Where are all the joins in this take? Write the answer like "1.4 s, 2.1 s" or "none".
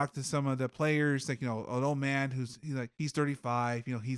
2.9 s